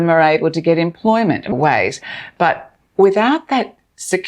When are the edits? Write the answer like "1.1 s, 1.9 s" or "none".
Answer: 1.5 s

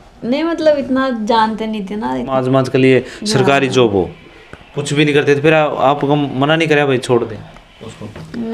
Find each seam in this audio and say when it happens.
2.3 s

